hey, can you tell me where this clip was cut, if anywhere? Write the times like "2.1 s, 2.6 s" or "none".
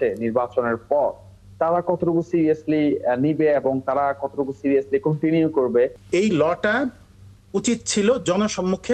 6.0 s